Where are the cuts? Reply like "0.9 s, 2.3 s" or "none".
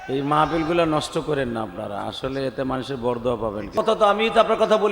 3.8 s